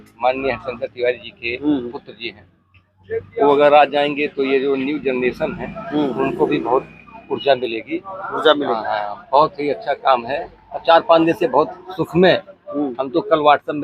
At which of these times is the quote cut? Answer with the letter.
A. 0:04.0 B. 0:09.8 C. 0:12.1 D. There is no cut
D